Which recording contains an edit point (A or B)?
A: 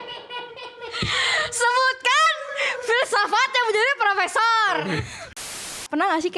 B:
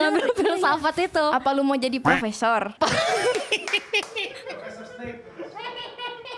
A